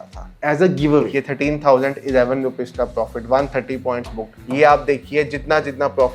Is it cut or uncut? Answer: cut